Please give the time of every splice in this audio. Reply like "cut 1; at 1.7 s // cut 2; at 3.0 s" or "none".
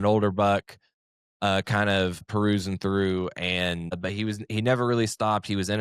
cut 1; at 2.3 s // cut 2; at 4.0 s